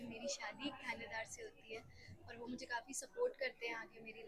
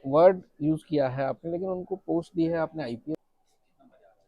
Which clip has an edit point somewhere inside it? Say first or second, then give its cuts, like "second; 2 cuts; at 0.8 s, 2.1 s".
second; 1 cut; at 3.2 s